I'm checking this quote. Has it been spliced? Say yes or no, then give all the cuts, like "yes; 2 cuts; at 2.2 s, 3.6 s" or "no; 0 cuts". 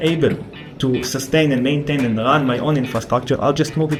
no; 0 cuts